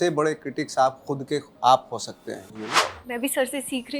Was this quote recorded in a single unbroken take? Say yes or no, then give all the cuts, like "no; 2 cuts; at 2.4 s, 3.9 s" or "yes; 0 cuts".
no; 1 cut; at 2.8 s